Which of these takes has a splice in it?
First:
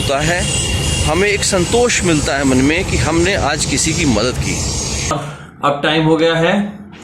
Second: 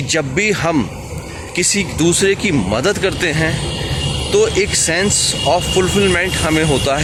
first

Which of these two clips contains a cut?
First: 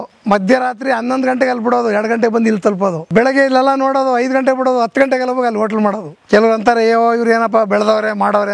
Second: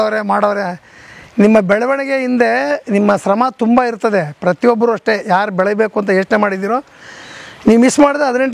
first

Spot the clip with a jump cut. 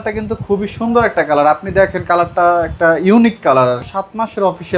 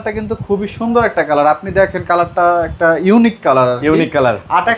first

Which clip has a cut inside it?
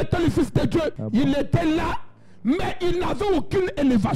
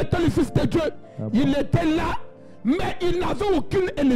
first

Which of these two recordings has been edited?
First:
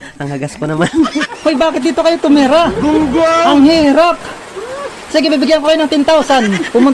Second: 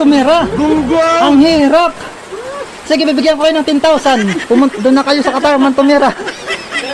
first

